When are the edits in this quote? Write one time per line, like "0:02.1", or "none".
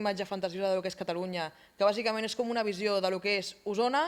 none